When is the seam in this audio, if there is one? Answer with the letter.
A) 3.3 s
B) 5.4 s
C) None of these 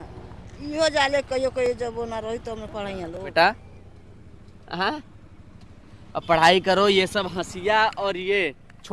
A